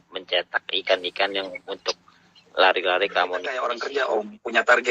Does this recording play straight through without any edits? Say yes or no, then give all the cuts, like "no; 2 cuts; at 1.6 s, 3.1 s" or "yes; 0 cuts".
no; 1 cut; at 3.8 s